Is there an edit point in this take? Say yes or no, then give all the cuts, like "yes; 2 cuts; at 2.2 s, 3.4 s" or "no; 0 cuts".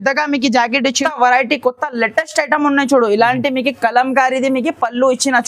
yes; 1 cut; at 1.0 s